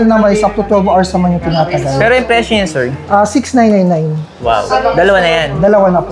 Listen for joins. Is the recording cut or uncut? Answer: uncut